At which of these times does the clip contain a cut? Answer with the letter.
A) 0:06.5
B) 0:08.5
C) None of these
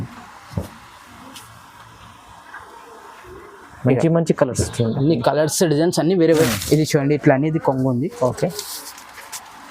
A